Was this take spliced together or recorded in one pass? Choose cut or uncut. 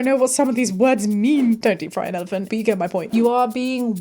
cut